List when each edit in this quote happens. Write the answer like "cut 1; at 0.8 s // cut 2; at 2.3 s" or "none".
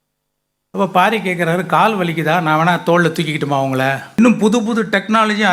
cut 1; at 4.0 s

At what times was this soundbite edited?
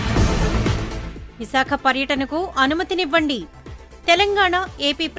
cut 1; at 1.0 s

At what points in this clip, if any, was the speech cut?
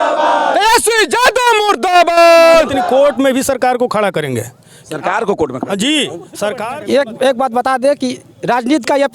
cut 1; at 2.8 s // cut 2; at 6.6 s

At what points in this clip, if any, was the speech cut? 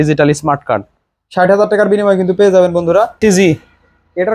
cut 1; at 3.1 s

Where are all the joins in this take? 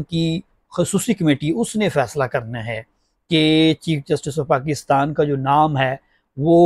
none

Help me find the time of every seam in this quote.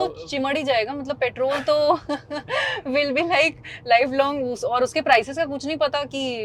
none

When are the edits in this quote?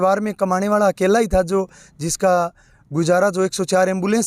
none

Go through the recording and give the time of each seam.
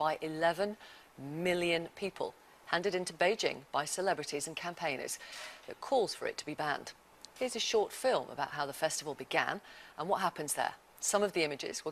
cut 1; at 4.9 s

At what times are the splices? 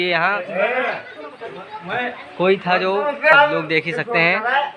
cut 1; at 3.3 s

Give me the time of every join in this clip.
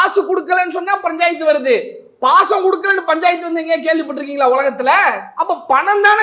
cut 1; at 5.2 s

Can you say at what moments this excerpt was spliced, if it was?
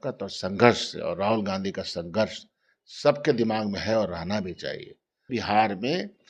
cut 1; at 5.3 s

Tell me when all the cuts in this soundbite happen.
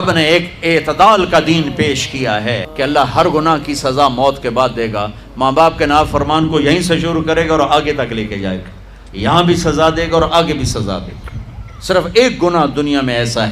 cut 1; at 2.7 s

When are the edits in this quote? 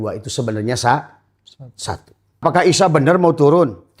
cut 1; at 2.4 s

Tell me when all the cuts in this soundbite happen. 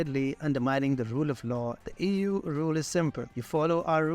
cut 1; at 1.8 s

